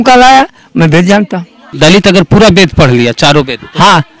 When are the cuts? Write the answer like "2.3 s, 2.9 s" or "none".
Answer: 1.7 s